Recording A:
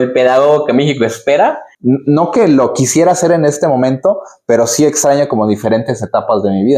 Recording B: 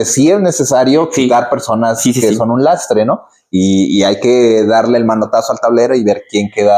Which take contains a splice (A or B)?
A